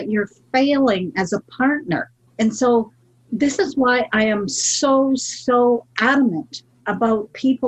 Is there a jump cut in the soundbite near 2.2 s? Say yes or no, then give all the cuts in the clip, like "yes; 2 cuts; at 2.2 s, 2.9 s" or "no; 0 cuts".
yes; 1 cut; at 2.2 s